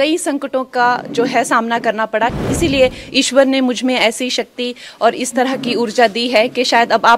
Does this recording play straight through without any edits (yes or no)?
no